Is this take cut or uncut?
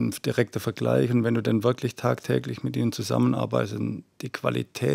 uncut